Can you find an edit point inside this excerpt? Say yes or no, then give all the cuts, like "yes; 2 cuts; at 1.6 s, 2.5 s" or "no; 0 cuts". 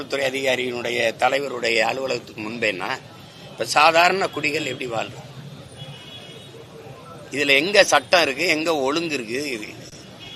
no; 0 cuts